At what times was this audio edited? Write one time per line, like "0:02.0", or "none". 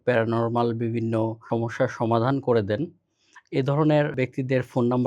0:01.4
0:04.1